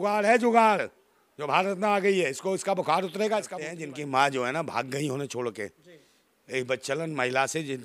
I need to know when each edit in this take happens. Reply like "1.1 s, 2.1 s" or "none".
3.7 s